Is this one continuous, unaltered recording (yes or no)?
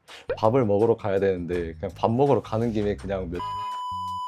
yes